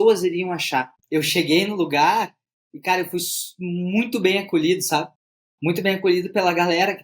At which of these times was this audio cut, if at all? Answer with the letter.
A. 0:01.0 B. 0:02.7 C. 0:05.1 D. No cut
A